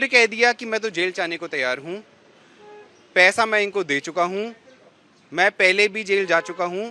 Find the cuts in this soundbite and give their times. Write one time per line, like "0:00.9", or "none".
none